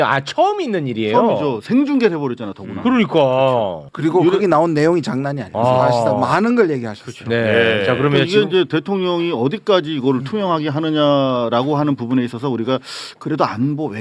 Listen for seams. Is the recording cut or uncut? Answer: cut